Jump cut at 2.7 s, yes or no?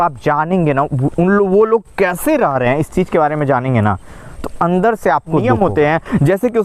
no